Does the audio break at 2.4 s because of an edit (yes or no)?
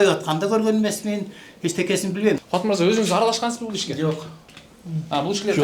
yes